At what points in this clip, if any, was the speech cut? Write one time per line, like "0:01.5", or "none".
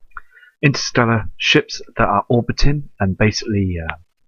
0:01.1